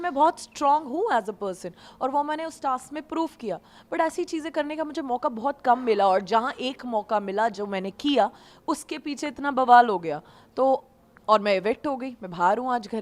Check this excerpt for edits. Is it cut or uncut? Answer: uncut